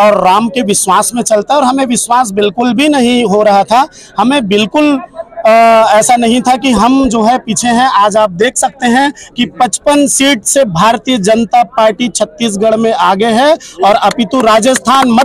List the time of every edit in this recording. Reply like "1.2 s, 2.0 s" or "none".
none